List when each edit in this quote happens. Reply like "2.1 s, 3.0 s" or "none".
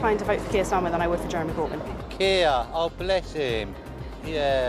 2.0 s